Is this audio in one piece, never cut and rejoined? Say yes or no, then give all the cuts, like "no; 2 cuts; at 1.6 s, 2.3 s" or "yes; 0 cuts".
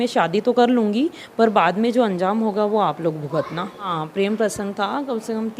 no; 1 cut; at 3.9 s